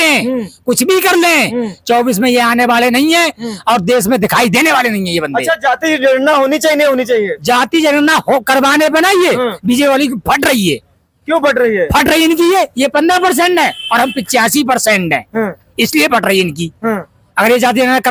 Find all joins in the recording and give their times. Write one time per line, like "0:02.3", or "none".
none